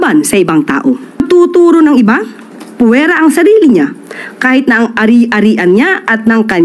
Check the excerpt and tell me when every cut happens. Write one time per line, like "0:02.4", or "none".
0:01.2